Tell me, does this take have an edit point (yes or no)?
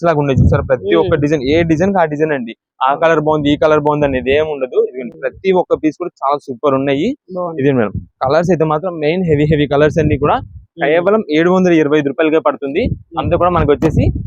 no